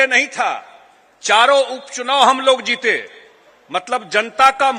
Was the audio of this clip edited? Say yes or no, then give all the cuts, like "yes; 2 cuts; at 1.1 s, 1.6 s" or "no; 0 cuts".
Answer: no; 0 cuts